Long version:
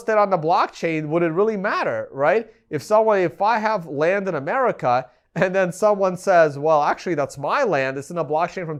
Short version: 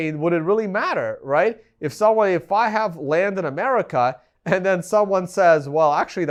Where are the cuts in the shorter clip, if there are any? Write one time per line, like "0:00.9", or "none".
none